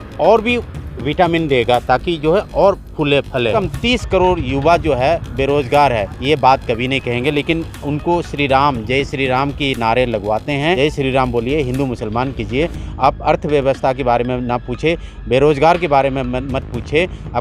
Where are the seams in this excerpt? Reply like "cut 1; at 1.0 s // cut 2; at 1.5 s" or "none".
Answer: cut 1; at 3.5 s // cut 2; at 10.8 s